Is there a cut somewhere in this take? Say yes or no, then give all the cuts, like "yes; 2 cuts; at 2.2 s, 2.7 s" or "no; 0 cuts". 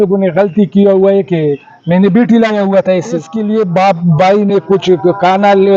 yes; 1 cut; at 3.3 s